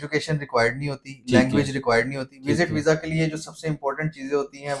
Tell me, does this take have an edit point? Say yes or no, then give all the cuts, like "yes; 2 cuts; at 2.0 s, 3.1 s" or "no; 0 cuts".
no; 0 cuts